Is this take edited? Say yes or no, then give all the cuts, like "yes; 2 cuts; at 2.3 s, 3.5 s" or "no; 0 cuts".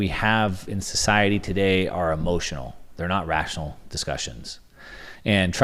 no; 0 cuts